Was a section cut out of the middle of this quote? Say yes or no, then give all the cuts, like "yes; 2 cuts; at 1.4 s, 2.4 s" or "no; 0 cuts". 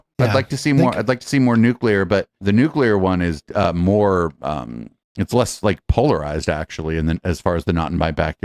no; 0 cuts